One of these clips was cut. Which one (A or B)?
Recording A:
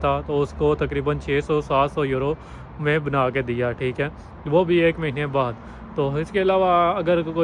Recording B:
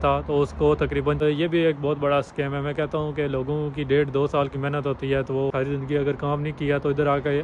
B